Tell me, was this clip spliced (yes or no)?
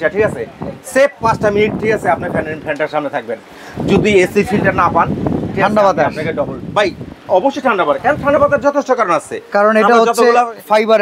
no